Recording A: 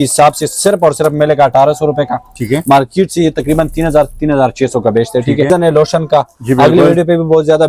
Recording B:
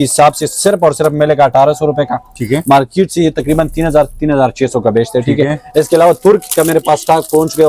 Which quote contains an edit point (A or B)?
A